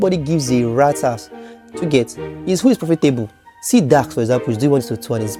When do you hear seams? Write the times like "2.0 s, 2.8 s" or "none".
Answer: none